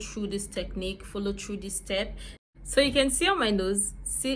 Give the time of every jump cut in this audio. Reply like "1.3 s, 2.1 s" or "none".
2.4 s